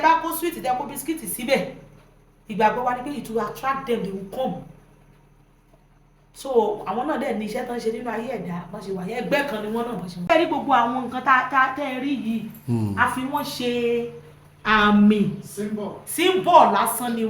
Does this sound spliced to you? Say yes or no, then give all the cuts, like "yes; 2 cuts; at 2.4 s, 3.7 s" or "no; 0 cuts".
yes; 1 cut; at 10.3 s